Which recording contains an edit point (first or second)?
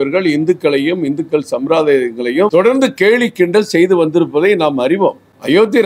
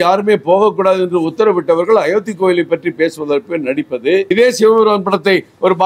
second